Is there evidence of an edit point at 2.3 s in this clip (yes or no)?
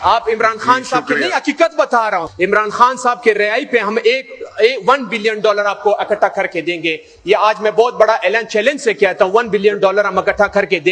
yes